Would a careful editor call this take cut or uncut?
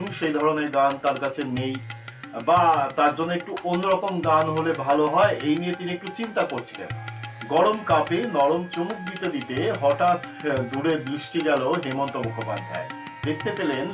cut